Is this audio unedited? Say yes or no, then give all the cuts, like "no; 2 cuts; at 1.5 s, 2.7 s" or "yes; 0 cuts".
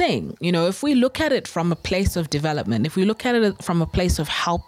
yes; 0 cuts